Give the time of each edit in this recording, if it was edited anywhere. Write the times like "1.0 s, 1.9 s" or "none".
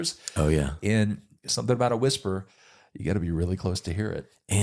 none